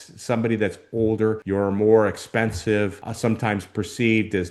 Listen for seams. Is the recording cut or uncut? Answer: cut